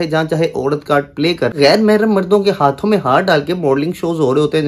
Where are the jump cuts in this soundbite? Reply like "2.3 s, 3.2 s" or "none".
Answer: 1.5 s